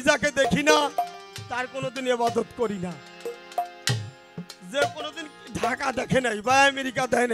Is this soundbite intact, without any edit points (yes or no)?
yes